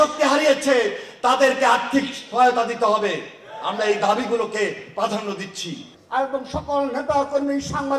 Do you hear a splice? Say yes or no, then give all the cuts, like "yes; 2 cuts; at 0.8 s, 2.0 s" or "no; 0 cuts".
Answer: yes; 1 cut; at 5.6 s